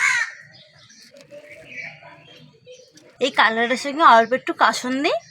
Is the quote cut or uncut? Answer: cut